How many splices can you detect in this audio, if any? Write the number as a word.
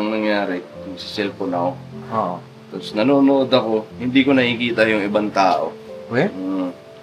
one